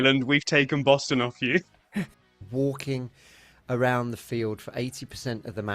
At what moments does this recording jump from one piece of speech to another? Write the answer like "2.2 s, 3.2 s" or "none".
2.2 s